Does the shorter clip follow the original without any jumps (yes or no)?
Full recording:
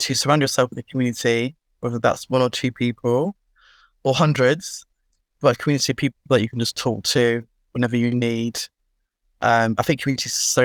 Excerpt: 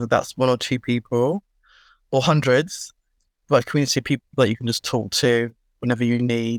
yes